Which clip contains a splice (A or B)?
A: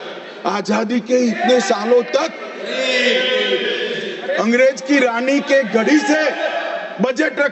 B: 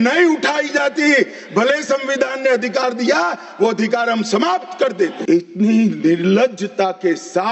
B